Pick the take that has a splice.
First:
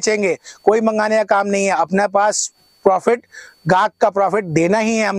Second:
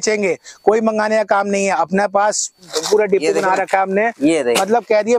second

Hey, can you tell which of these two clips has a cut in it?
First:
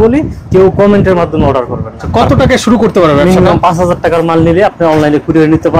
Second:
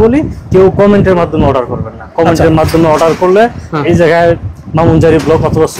first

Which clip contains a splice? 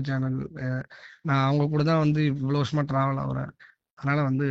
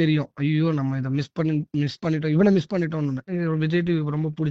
second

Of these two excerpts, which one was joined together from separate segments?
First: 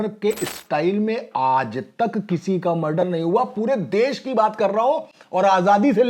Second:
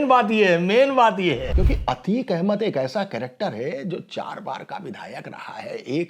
second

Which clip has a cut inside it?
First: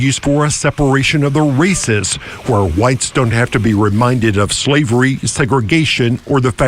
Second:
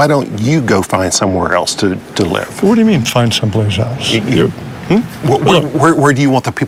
first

